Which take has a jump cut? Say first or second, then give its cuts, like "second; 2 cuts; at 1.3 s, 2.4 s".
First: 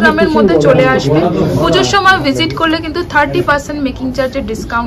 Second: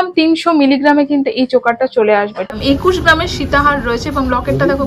second; 1 cut; at 2.5 s